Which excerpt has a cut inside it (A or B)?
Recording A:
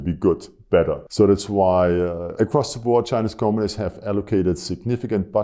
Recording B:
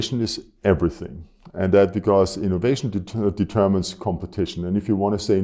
A